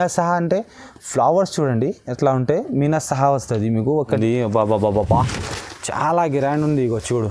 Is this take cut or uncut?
cut